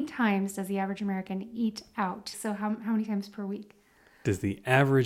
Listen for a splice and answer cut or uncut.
cut